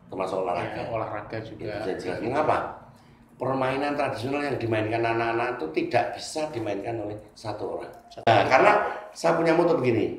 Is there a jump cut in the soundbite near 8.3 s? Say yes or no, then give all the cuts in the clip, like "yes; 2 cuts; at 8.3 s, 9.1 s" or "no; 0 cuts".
yes; 1 cut; at 8.3 s